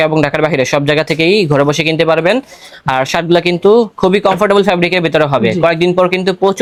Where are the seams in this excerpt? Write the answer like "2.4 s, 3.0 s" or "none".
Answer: none